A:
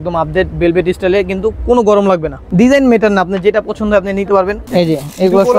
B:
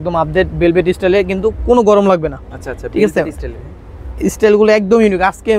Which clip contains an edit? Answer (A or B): A